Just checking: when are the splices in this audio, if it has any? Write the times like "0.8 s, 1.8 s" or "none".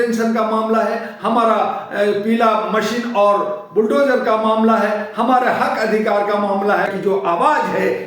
6.9 s